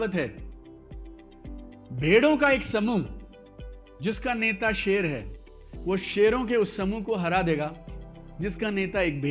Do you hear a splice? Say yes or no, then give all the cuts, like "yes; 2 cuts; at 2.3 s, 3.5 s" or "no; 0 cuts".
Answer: no; 0 cuts